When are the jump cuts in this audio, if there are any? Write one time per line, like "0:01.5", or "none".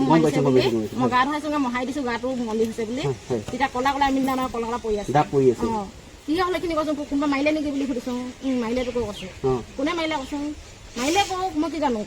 none